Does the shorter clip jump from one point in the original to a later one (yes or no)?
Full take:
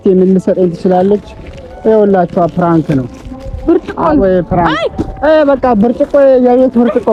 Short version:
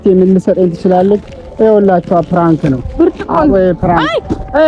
yes